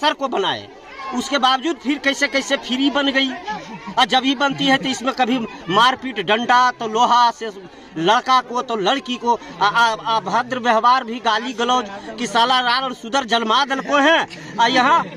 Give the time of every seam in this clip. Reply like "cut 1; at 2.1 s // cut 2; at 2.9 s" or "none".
none